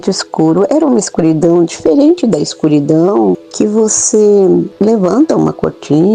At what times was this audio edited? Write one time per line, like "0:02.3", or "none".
0:03.5
0:04.7